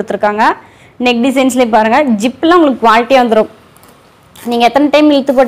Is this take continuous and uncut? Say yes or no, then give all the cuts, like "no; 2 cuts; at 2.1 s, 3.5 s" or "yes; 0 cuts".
yes; 0 cuts